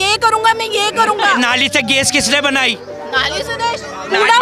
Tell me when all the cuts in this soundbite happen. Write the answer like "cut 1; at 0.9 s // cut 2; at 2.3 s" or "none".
cut 1; at 1.3 s // cut 2; at 3.2 s